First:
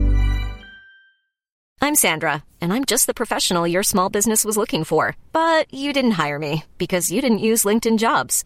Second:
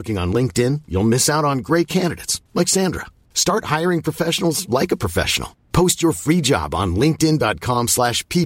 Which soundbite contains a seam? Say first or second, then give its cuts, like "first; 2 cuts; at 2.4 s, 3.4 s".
first; 1 cut; at 1.6 s